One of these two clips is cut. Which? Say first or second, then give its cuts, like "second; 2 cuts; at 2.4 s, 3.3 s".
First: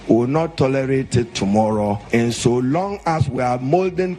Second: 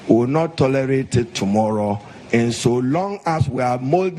first; 1 cut; at 2.0 s